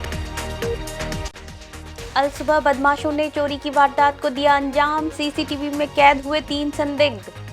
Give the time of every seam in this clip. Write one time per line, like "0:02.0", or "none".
0:01.2